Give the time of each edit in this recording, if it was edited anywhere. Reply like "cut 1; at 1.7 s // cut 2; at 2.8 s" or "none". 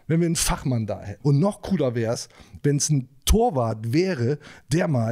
cut 1; at 1.1 s